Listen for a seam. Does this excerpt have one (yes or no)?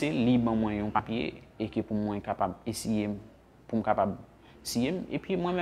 yes